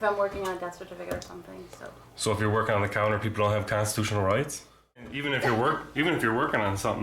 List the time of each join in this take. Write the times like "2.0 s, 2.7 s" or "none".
5.1 s